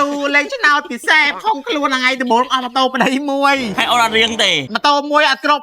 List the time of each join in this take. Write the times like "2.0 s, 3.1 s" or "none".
1.3 s, 3.7 s, 4.7 s